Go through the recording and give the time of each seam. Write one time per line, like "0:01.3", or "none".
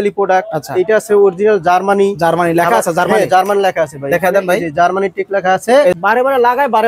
0:06.0